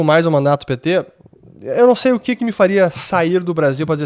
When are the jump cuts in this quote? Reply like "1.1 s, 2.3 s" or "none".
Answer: none